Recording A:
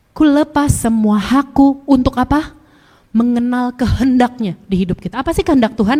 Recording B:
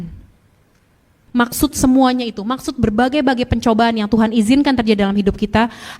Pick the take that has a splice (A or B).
B